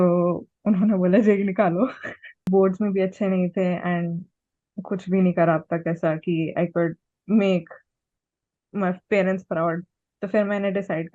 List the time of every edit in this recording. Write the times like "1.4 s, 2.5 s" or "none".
2.4 s